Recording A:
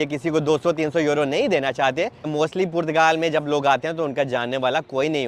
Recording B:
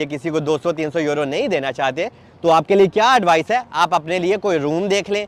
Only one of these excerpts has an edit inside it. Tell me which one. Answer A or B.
A